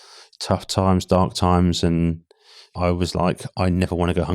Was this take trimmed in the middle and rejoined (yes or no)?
yes